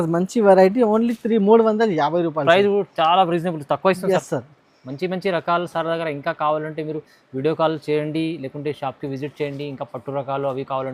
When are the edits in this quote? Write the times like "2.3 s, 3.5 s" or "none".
none